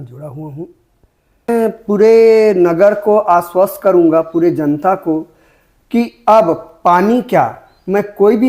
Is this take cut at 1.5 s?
yes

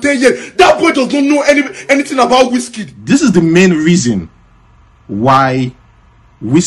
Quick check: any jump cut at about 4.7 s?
no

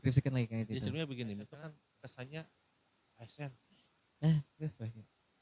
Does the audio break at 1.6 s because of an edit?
yes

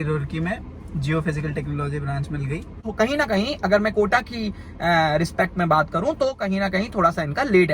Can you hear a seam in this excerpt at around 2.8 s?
yes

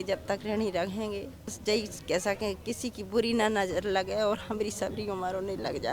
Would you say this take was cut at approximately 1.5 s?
yes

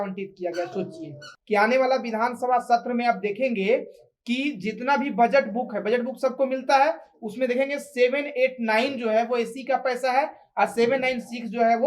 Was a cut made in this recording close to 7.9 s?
no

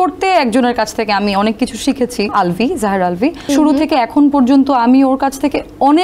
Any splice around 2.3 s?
yes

